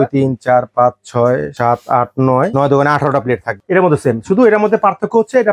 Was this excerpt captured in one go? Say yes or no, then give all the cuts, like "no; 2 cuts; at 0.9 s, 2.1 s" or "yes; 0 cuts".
no; 3 cuts; at 1.5 s, 2.5 s, 3.5 s